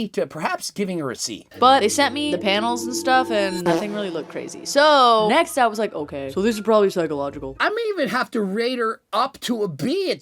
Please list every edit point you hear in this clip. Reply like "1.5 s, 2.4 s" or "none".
1.5 s